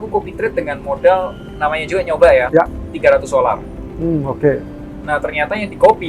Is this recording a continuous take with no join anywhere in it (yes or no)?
yes